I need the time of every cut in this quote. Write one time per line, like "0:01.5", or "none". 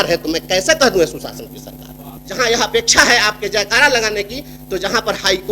0:02.2